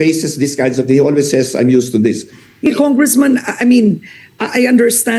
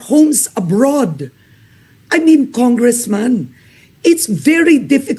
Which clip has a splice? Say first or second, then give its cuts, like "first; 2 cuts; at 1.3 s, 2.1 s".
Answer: first; 1 cut; at 2.7 s